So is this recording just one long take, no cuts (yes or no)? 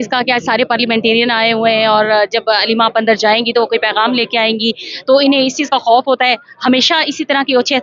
yes